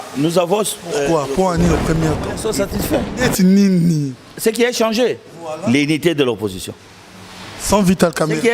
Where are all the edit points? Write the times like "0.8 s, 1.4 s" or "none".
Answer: 2.4 s

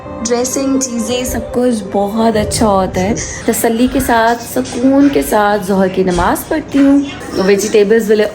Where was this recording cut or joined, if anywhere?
3.3 s, 7.2 s

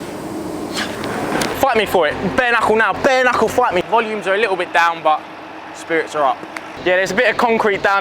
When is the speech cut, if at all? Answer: 1.5 s, 3.9 s, 6.7 s

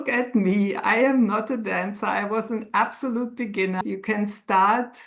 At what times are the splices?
3.8 s

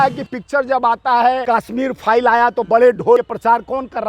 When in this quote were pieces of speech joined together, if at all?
1.4 s, 3.2 s

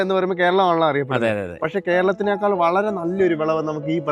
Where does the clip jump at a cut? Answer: none

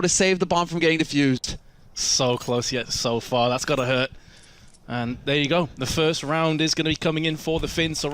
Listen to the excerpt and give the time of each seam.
5.2 s

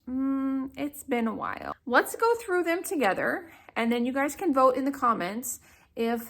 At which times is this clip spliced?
1.7 s

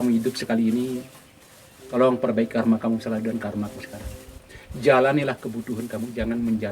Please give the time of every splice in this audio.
none

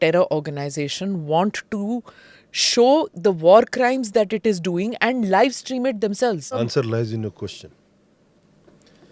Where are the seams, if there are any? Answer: 6.6 s

